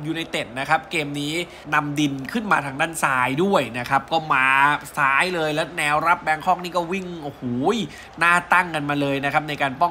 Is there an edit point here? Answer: yes; 1 cut; at 1.6 s

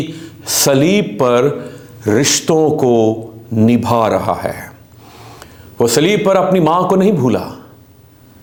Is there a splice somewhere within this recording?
no; 0 cuts

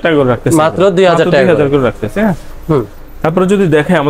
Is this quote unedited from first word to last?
yes; 0 cuts

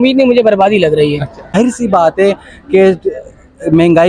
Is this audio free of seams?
no; 1 cut; at 1.6 s

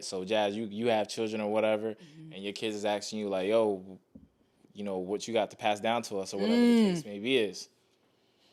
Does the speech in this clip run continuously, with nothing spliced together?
yes; 0 cuts

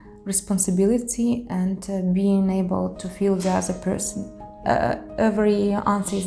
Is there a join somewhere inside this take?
yes; 1 cut; at 4.6 s

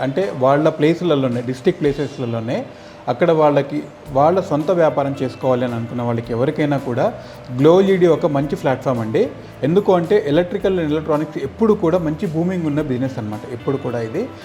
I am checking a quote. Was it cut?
no; 0 cuts

